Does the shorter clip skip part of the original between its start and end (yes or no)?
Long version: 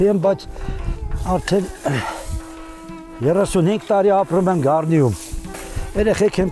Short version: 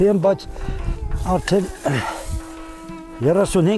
no